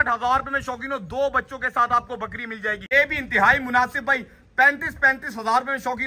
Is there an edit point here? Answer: yes; 1 cut; at 2.8 s

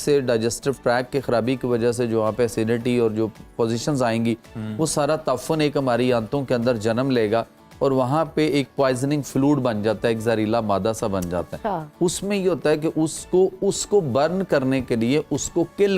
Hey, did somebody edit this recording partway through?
no; 0 cuts

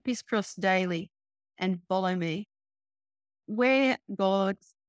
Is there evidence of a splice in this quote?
yes; 1 cut; at 3.4 s

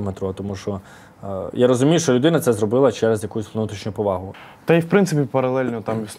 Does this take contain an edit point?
yes; 1 cut; at 4.4 s

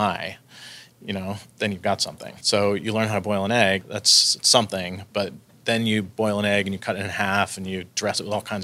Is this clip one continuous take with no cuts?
no; 3 cuts; at 1.4 s, 2.3 s, 3.8 s

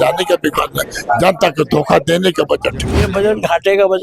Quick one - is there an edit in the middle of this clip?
yes; 1 cut; at 3.0 s

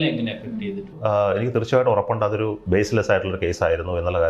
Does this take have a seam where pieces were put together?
yes; 2 cuts; at 1.0 s, 2.6 s

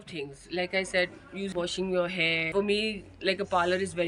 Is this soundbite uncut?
no; 2 cuts; at 1.5 s, 2.5 s

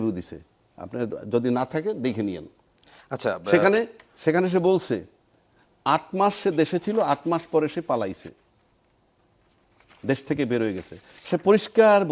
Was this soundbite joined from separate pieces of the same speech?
no; 0 cuts

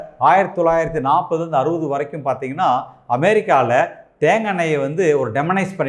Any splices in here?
no; 0 cuts

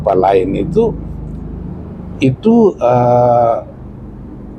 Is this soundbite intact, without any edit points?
yes; 0 cuts

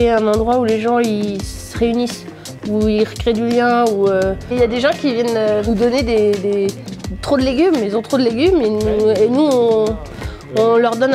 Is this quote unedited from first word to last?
yes; 0 cuts

